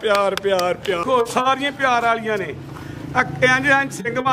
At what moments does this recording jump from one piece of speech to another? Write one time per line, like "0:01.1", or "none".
0:01.0